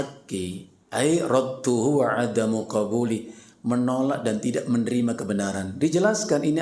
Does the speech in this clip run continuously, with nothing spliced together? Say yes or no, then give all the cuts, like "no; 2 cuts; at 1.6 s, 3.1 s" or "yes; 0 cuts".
yes; 0 cuts